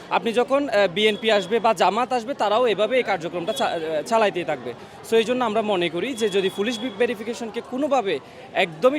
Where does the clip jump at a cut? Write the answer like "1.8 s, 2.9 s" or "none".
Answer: none